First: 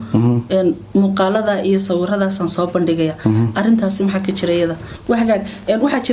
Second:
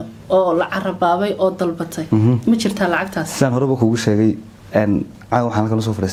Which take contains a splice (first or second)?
first